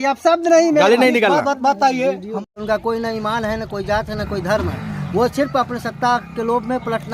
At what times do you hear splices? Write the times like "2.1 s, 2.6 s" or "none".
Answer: 2.4 s